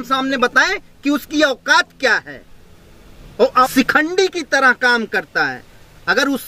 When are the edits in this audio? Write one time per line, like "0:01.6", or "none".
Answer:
0:03.7